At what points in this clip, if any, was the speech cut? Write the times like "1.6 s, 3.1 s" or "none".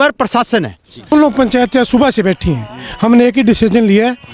1.1 s